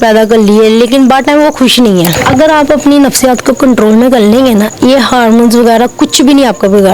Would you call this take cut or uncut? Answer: cut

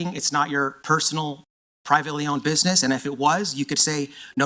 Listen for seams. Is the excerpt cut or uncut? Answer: uncut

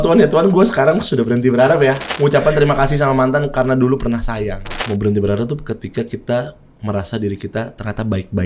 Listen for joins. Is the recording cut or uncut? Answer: cut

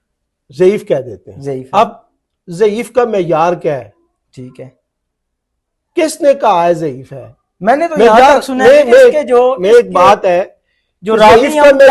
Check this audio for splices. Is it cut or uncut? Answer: uncut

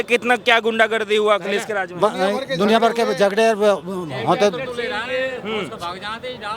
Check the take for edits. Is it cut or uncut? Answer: uncut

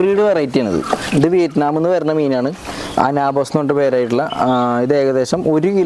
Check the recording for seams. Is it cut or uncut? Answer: uncut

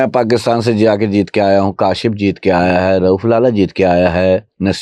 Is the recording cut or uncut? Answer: uncut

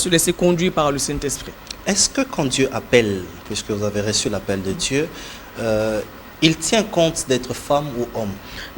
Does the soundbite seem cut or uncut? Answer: uncut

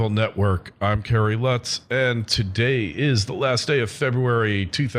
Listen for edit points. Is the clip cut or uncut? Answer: uncut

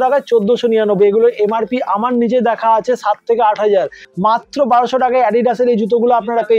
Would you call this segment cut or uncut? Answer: cut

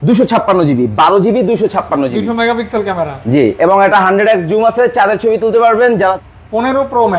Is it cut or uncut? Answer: cut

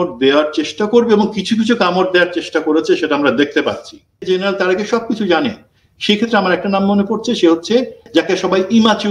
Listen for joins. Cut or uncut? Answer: cut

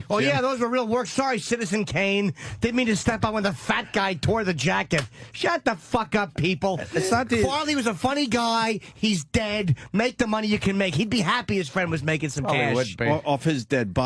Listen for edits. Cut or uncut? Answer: cut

